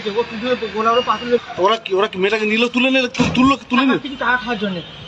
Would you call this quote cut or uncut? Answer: cut